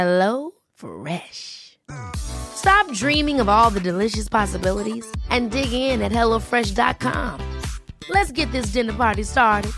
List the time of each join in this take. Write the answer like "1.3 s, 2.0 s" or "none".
none